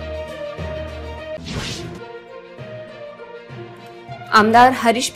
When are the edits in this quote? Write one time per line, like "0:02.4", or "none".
0:01.4